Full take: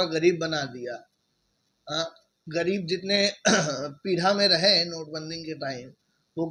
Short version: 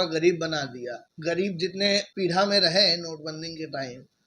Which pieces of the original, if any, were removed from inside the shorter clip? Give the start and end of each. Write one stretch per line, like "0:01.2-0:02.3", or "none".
0:01.0-0:02.3
0:03.4-0:03.9